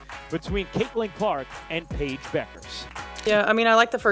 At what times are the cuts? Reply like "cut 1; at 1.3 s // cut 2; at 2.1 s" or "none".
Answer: cut 1; at 3.2 s